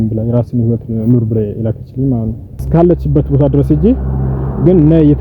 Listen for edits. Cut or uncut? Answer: cut